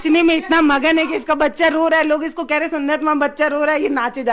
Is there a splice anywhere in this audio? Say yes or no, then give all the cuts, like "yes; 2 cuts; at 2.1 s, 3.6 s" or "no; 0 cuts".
no; 0 cuts